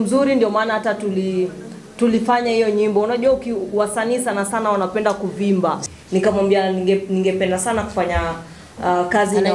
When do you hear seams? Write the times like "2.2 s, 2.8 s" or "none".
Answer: 5.8 s